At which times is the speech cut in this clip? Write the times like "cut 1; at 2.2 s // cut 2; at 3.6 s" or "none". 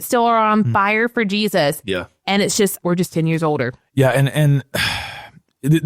none